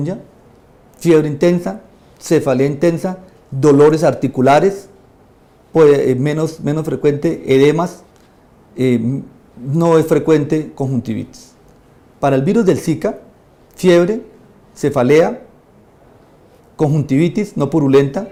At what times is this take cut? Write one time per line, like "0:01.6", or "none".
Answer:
none